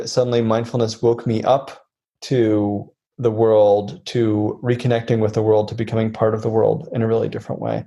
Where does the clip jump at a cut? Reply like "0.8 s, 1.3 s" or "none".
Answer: none